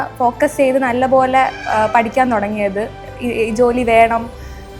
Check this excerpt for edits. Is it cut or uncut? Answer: uncut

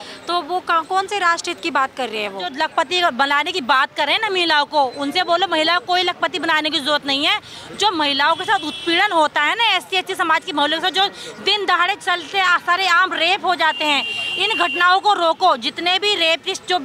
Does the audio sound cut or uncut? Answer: cut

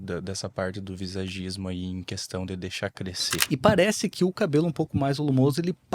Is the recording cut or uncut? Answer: cut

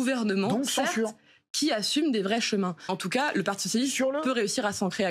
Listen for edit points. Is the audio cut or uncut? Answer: cut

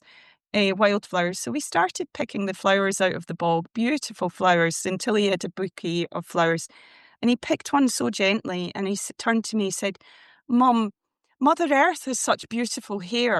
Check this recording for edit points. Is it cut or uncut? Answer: uncut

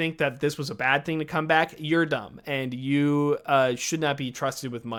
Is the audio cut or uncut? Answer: uncut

